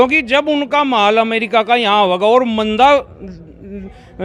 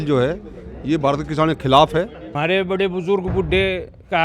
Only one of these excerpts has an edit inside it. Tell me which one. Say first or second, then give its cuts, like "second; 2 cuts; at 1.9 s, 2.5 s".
second; 1 cut; at 2.2 s